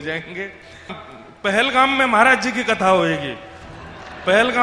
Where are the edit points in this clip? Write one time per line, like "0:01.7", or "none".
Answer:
0:01.0